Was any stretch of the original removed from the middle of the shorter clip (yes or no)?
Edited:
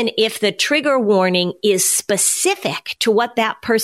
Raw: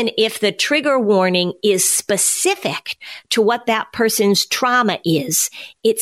yes